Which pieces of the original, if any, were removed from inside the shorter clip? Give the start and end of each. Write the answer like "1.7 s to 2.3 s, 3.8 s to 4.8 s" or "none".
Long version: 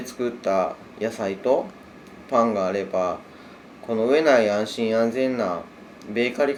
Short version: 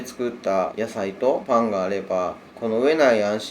0.9 s to 1.7 s, 3.3 s to 3.7 s